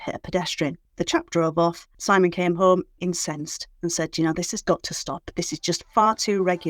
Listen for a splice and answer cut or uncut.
cut